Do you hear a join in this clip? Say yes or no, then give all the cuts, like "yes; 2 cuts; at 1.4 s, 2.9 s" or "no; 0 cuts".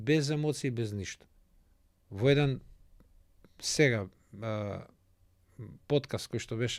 no; 0 cuts